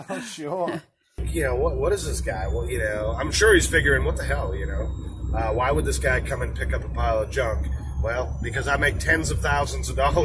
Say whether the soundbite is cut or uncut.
cut